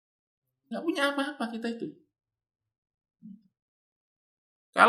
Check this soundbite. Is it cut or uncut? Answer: uncut